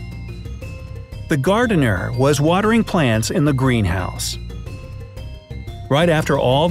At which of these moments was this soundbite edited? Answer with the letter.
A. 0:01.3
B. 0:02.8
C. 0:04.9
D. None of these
A